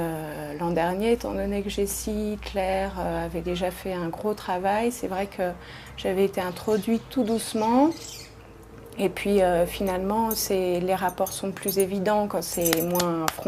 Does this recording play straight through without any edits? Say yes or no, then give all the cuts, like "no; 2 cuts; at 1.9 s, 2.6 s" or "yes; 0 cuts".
no; 1 cut; at 11.8 s